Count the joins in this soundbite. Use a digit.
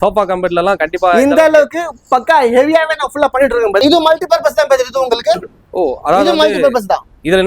1